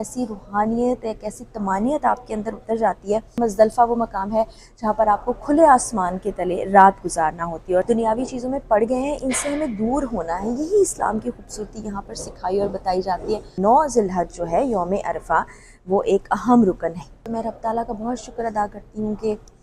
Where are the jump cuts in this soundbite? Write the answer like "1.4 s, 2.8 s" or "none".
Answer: 3.4 s, 7.8 s, 13.5 s, 17.2 s